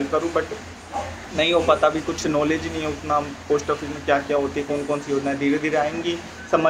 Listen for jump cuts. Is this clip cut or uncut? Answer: uncut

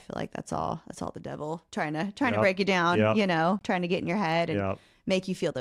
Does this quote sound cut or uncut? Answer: uncut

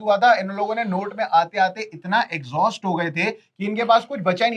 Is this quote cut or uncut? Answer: uncut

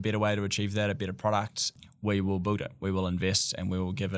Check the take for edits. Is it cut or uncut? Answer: cut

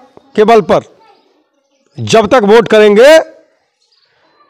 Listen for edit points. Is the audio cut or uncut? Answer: uncut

